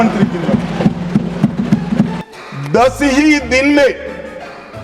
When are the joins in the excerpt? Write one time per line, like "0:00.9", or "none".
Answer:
0:02.1